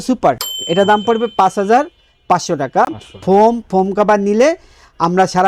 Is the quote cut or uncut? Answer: uncut